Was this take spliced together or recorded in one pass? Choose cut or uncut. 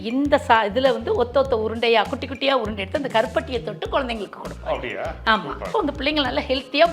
cut